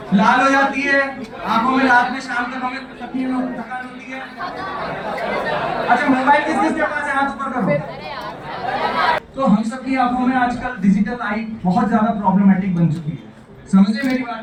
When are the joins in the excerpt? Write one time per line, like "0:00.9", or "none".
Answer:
none